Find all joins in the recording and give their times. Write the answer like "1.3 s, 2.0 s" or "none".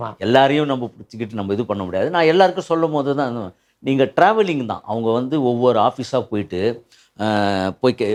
none